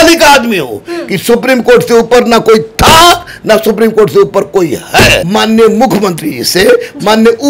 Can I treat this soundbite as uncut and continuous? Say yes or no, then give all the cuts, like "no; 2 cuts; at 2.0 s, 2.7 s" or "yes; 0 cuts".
no; 1 cut; at 5.2 s